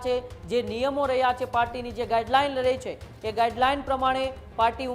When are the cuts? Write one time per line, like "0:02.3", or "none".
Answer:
none